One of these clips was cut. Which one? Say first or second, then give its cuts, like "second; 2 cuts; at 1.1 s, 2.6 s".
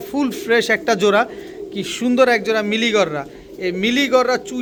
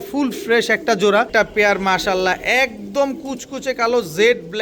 second; 1 cut; at 1.3 s